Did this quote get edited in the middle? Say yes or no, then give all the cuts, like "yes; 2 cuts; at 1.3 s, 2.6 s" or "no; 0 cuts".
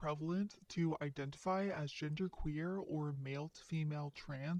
no; 0 cuts